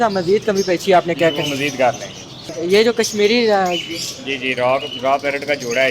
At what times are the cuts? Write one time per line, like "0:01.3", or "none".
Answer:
0:02.5